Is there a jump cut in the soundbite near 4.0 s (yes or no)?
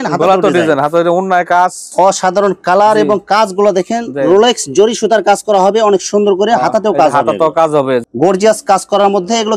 no